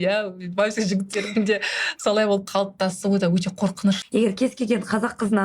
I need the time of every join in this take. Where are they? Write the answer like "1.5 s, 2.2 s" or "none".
4.0 s